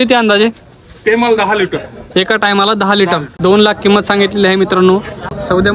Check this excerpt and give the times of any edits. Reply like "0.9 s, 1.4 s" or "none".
3.3 s